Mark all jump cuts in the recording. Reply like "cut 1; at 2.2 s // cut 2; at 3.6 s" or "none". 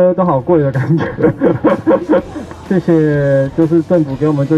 cut 1; at 2.4 s